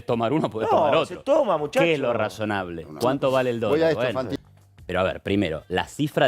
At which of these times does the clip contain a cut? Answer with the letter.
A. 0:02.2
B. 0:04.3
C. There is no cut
B